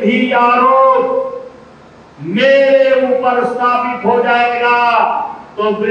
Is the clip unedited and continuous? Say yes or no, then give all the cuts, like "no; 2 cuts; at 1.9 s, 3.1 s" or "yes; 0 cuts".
yes; 0 cuts